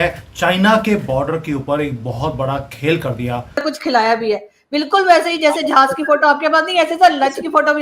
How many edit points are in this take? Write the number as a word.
one